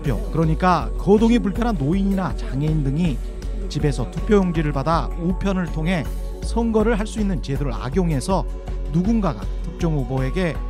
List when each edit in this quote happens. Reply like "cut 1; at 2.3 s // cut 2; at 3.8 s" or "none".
none